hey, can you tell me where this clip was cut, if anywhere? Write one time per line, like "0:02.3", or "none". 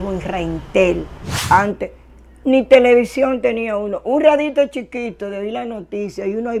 0:01.3